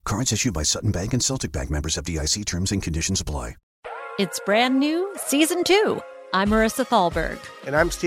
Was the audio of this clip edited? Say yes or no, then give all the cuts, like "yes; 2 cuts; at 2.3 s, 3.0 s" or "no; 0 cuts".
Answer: yes; 1 cut; at 3.7 s